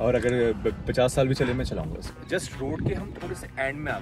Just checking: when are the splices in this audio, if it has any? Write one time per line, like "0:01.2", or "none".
0:02.1